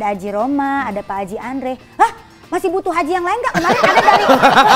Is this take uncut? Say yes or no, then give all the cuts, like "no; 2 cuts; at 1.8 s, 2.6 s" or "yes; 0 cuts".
yes; 0 cuts